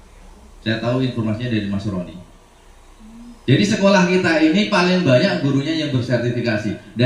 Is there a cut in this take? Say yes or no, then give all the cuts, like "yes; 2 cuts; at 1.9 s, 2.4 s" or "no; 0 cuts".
no; 0 cuts